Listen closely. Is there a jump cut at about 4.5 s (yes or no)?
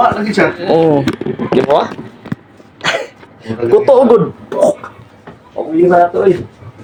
no